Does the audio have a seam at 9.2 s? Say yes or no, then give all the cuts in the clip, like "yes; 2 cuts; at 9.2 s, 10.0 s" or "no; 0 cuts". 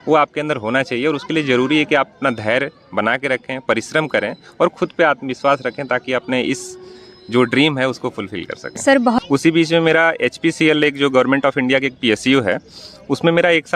yes; 1 cut; at 9.2 s